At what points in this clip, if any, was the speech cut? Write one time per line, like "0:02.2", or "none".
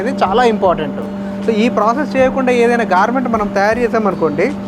none